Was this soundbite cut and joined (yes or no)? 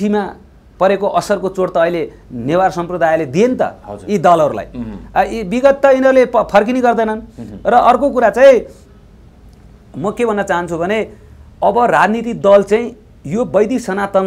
no